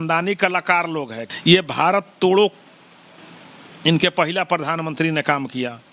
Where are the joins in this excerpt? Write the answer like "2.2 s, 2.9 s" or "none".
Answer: 1.2 s